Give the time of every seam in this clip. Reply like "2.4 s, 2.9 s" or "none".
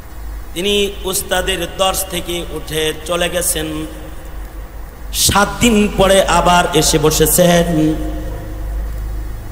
none